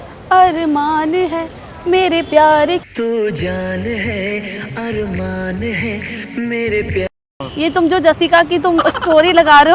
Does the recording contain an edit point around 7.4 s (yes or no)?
yes